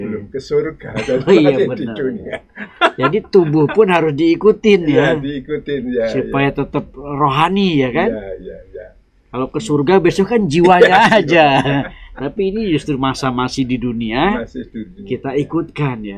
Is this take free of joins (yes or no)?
yes